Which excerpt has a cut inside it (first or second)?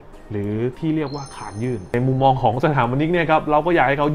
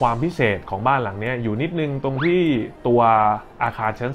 first